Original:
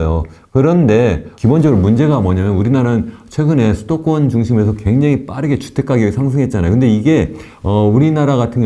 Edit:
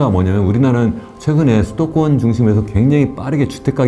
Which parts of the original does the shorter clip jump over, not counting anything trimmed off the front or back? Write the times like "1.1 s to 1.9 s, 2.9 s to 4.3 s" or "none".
none